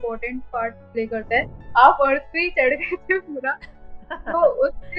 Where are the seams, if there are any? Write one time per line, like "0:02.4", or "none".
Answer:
0:01.6